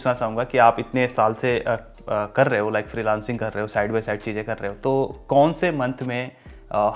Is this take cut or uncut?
uncut